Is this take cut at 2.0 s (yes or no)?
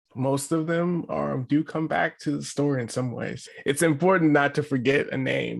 no